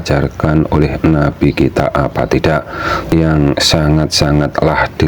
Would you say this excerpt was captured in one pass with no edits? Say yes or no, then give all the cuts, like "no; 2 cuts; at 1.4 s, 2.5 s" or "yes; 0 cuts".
no; 1 cut; at 3.1 s